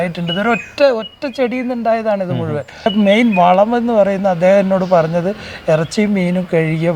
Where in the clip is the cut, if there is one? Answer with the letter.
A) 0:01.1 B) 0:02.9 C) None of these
B